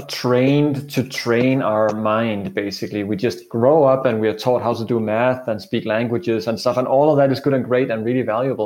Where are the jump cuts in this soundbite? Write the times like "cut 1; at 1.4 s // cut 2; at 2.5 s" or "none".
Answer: none